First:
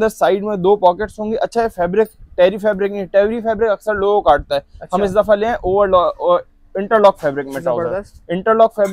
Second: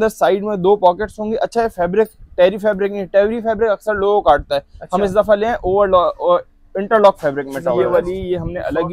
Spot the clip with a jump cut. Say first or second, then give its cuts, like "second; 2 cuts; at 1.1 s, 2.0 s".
second; 1 cut; at 7.8 s